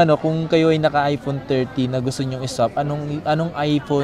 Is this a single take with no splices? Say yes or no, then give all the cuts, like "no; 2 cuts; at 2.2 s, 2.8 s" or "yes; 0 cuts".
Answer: yes; 0 cuts